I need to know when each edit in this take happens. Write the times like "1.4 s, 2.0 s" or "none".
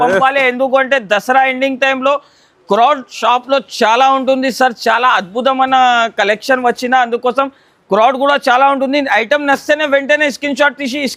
none